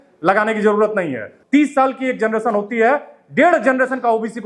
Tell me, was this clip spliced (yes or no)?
yes